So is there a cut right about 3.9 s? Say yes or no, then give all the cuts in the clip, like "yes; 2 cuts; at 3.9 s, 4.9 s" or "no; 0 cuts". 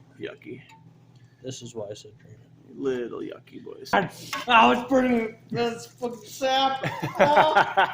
yes; 1 cut; at 3.9 s